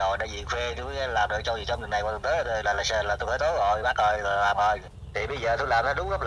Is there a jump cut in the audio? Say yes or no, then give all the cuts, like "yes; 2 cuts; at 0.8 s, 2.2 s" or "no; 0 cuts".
yes; 1 cut; at 5.0 s